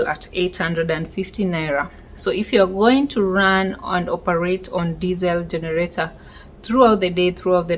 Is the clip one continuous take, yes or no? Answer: yes